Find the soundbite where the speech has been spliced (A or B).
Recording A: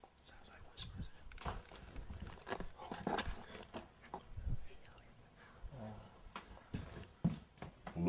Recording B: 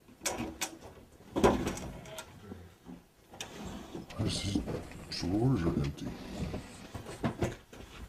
A